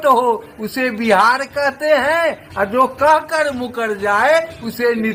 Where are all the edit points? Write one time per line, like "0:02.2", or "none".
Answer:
none